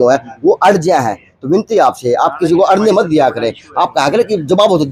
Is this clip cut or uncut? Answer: uncut